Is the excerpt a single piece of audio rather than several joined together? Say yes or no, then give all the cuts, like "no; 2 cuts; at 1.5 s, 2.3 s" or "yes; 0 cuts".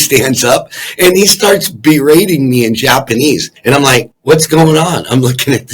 no; 1 cut; at 3.6 s